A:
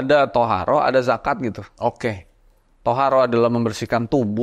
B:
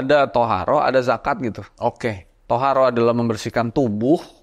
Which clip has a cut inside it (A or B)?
B